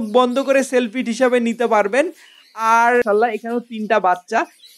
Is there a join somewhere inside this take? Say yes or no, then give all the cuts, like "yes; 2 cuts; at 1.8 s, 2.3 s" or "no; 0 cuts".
yes; 1 cut; at 3.0 s